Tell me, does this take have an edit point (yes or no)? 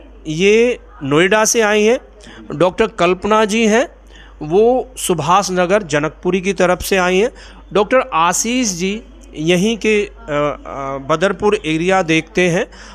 no